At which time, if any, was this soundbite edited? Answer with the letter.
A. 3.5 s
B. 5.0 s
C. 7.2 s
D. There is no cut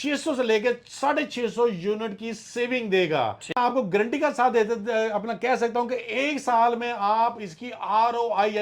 A